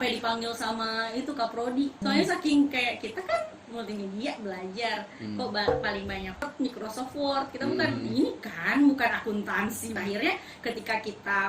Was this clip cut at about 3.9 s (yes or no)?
no